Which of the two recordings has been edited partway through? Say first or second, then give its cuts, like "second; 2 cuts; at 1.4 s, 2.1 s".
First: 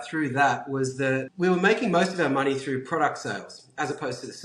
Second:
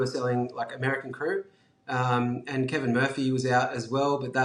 first; 1 cut; at 1.3 s